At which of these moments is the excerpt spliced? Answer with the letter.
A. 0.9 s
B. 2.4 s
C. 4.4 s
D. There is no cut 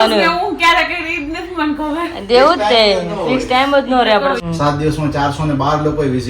C